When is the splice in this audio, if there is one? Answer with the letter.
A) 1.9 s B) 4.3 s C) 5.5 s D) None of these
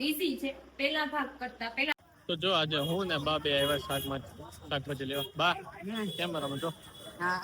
A